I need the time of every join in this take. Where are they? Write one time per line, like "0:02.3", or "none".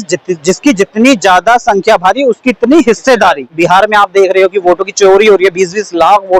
0:03.5